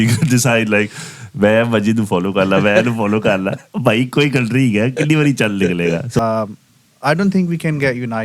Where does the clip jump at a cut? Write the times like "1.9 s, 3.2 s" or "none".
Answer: 6.2 s